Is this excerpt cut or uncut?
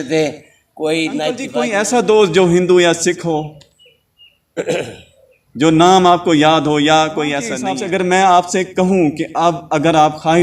cut